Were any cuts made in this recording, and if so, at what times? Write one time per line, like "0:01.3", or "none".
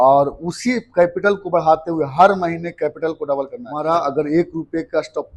0:03.7